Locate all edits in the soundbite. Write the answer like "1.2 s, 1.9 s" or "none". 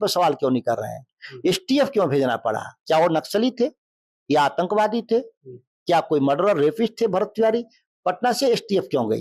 none